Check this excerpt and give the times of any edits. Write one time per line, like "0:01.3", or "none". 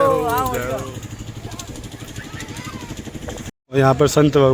0:03.5